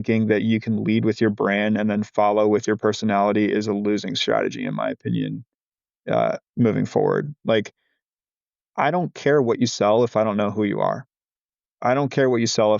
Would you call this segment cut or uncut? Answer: uncut